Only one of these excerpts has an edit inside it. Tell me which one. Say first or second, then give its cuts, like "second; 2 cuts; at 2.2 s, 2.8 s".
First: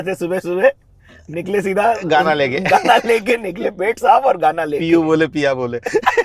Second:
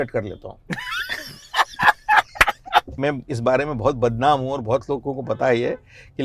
second; 1 cut; at 3.0 s